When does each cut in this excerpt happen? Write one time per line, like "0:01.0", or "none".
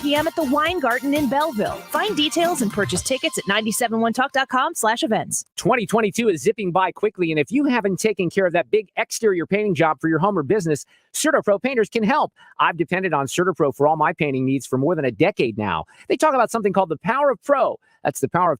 0:05.4